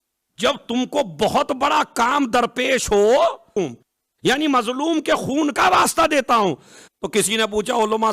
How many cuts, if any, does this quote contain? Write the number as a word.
one